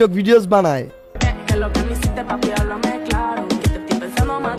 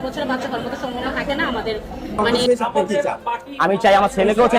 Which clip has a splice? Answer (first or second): second